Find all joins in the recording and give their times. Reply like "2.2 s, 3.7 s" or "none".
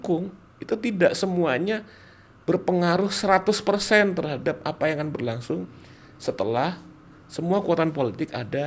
none